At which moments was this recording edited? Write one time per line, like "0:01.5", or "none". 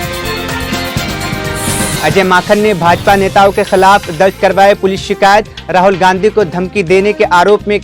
none